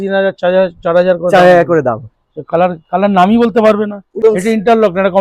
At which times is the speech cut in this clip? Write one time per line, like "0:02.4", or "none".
0:04.2